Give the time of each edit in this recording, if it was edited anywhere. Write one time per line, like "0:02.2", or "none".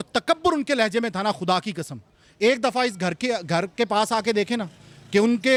none